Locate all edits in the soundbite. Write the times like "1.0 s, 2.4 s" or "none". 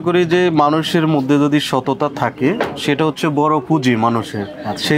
none